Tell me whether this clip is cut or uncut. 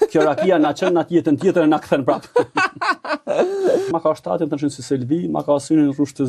cut